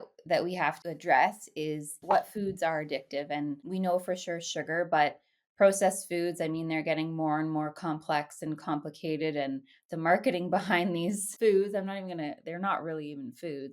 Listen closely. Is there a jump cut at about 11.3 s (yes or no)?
yes